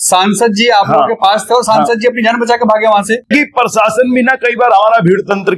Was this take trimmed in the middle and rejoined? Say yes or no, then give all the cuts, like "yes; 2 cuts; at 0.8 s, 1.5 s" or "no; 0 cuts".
yes; 1 cut; at 3.3 s